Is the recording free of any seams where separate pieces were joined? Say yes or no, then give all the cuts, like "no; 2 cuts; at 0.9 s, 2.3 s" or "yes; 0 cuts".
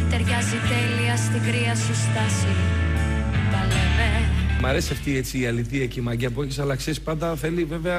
no; 1 cut; at 4.3 s